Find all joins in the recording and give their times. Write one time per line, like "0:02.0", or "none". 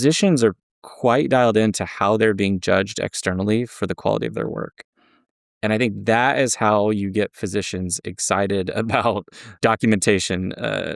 0:09.5